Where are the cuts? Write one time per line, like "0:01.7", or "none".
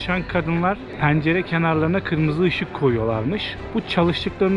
none